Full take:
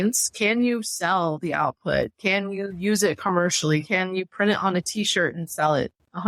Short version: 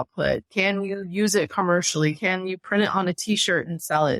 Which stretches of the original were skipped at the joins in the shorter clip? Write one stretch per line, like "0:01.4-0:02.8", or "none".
none

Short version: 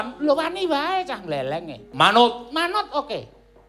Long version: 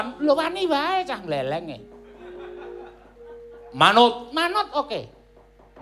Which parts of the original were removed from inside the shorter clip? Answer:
0:01.8-0:03.6

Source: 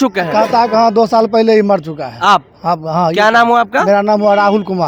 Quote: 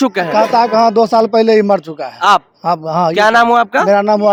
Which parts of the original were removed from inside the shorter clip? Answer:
none

